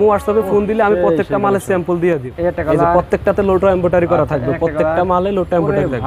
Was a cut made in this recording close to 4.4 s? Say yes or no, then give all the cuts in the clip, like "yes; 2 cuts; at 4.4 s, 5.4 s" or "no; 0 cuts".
no; 1 cut; at 2.3 s